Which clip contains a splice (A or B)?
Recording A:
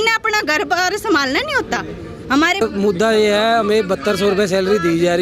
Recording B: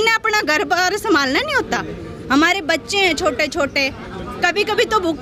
A